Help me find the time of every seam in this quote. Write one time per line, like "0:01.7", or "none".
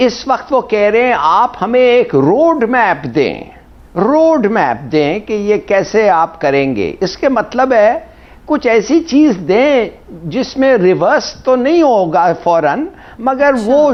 none